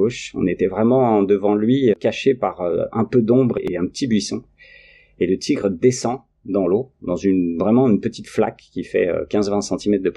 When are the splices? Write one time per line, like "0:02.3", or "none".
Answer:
0:02.0